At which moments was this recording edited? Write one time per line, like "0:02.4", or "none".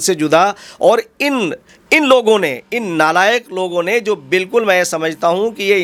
none

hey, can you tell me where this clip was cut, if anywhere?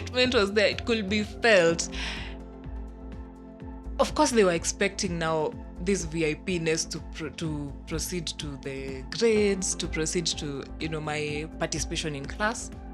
none

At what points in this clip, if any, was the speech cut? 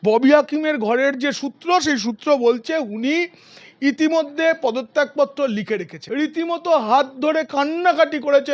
0:06.0

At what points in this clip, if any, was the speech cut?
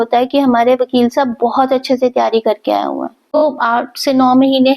0:03.1

